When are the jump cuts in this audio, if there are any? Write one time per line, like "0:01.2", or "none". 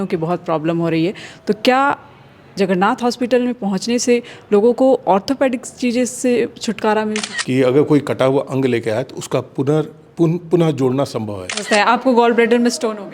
0:07.3
0:11.6